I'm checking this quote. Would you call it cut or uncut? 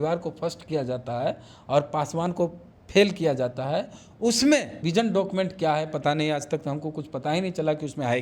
cut